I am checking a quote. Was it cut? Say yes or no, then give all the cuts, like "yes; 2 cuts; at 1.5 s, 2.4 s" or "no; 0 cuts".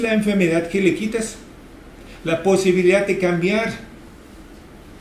no; 0 cuts